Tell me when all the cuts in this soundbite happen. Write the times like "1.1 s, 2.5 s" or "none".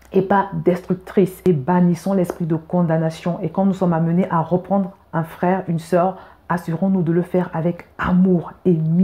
1.4 s